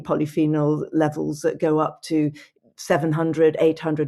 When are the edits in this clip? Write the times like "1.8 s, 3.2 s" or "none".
none